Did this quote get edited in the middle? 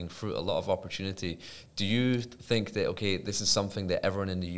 no; 0 cuts

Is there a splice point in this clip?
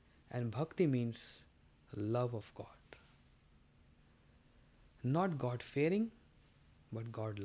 no; 0 cuts

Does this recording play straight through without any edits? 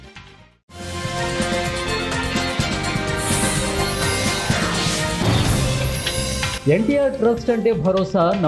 no; 1 cut; at 6.6 s

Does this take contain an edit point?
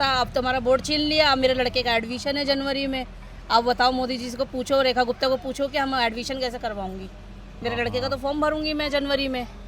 no; 0 cuts

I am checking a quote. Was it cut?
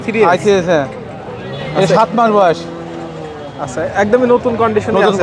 no; 0 cuts

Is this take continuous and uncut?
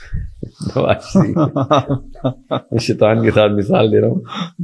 yes; 0 cuts

